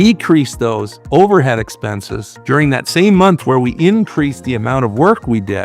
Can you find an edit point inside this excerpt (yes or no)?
no